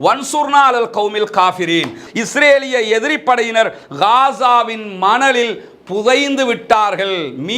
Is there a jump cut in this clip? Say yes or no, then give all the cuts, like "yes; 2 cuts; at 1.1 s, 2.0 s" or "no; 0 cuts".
yes; 1 cut; at 2.0 s